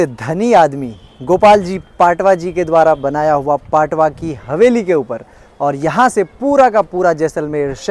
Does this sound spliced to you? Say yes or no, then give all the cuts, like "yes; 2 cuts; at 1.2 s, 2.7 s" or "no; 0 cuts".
no; 0 cuts